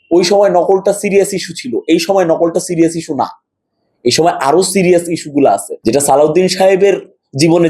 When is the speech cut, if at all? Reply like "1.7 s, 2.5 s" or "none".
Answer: 5.7 s